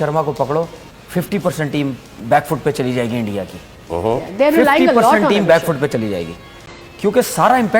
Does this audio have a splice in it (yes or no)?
no